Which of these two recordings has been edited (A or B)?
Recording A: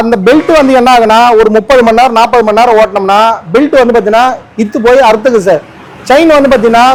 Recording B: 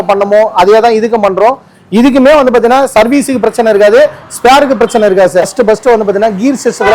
B